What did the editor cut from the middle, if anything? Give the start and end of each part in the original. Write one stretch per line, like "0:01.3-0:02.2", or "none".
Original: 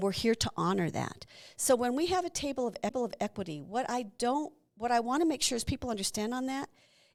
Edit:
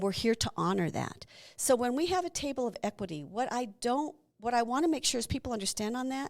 0:02.7-0:03.1